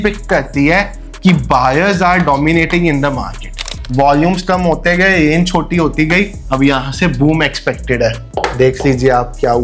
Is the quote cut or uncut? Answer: cut